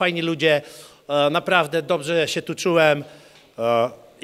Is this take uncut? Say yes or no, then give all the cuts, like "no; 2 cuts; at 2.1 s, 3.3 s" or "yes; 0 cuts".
yes; 0 cuts